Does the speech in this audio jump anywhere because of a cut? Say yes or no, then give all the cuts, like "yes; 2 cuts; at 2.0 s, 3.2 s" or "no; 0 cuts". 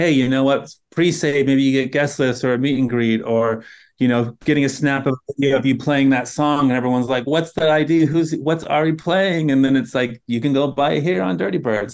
no; 0 cuts